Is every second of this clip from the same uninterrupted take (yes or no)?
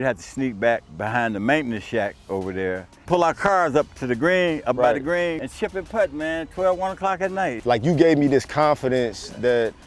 no